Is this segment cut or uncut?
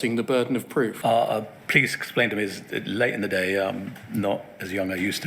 cut